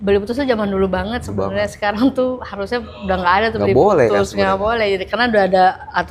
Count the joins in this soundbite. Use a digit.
0